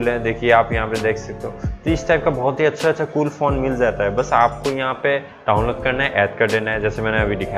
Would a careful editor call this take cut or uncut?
uncut